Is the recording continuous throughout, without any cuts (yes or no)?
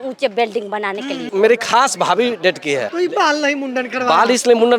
no